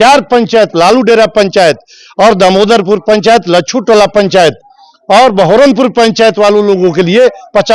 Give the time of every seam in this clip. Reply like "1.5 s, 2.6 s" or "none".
none